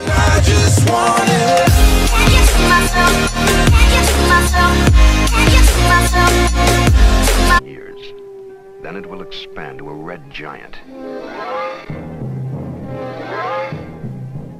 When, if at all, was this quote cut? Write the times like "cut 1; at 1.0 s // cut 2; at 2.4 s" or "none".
none